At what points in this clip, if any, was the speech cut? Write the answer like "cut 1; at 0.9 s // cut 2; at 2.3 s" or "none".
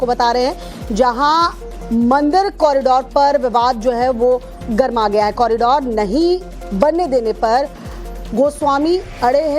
cut 1; at 6.6 s